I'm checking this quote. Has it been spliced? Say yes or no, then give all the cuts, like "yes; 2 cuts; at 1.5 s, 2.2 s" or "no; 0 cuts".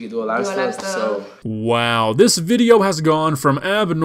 no; 0 cuts